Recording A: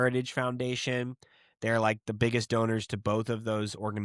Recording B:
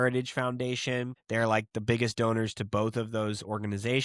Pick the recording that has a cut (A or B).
B